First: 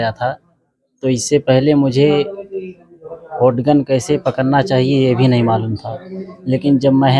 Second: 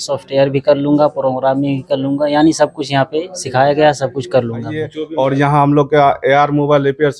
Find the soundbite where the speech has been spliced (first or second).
second